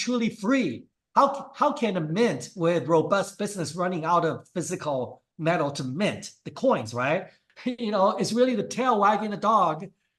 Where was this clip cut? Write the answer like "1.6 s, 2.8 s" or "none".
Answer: 7.4 s

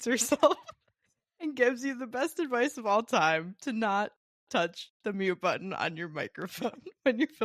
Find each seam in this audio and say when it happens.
none

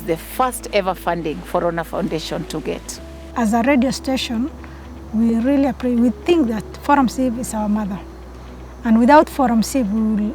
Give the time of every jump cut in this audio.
3.3 s

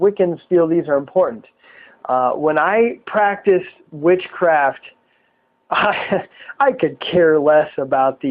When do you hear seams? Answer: 3.8 s

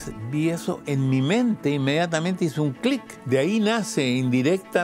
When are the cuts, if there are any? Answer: 3.1 s

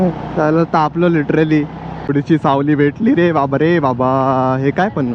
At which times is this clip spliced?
2.1 s

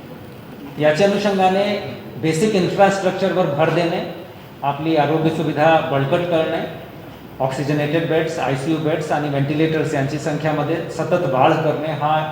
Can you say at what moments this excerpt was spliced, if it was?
4.8 s

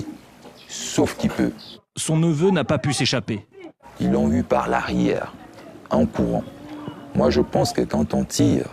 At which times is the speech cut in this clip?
1.5 s

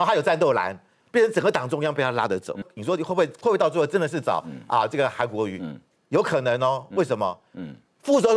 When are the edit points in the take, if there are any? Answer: 2.7 s

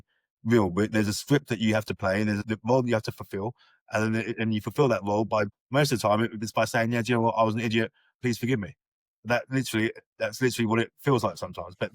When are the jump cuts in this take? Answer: 2.5 s, 5.5 s, 8.1 s

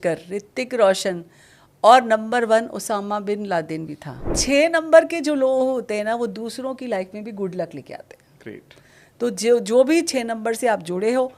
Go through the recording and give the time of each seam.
4.4 s

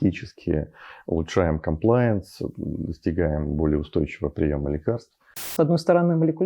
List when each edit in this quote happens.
5.5 s

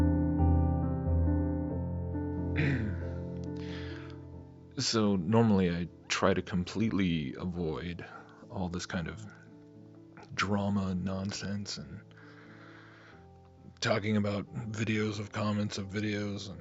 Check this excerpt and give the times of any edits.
3.6 s

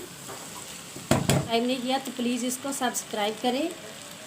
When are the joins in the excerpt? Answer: 1.5 s

